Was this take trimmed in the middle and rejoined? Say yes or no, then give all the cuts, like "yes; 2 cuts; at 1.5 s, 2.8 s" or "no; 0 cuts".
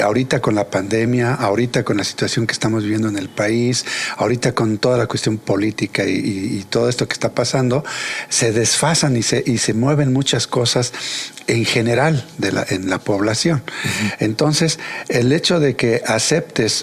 no; 0 cuts